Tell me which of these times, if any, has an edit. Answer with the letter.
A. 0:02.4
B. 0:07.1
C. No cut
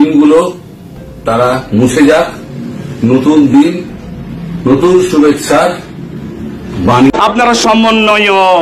B